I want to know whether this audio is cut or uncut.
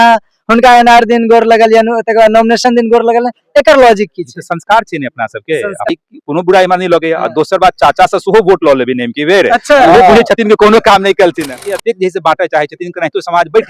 cut